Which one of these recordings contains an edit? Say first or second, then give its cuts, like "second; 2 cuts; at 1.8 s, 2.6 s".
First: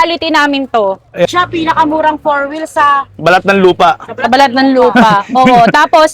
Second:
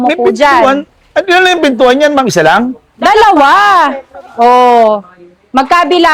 first; 1 cut; at 1.3 s